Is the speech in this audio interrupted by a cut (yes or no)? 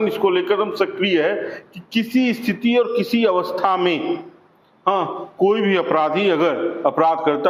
no